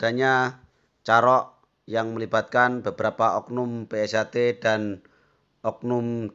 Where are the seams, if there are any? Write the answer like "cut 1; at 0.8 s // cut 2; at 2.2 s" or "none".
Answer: none